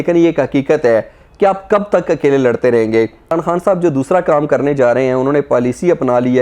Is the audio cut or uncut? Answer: cut